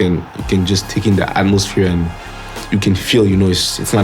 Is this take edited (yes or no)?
no